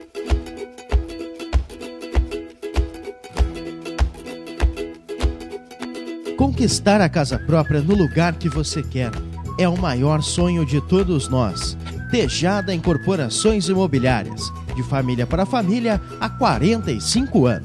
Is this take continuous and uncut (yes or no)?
yes